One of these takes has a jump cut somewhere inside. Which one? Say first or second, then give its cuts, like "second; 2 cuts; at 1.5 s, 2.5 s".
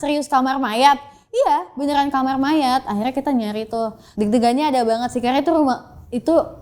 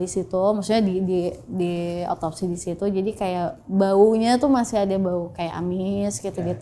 first; 1 cut; at 4.0 s